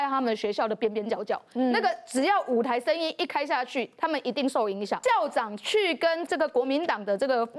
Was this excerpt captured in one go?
no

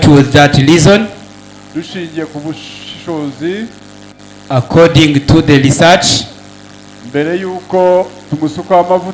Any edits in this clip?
no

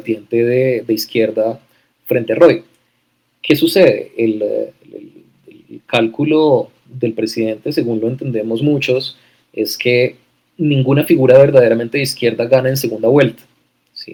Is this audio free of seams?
yes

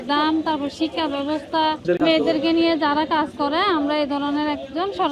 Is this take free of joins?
no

